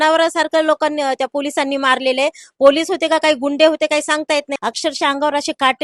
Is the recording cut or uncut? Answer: cut